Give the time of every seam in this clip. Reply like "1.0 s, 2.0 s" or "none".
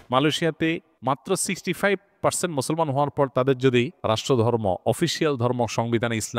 0.9 s, 3.9 s